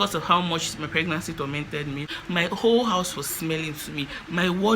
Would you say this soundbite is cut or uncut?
cut